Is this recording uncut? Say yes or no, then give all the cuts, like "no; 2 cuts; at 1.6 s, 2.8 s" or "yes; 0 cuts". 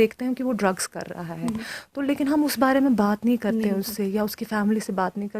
yes; 0 cuts